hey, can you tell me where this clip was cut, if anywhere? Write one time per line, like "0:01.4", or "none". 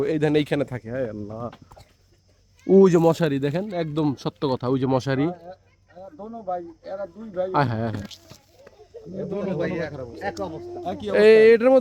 none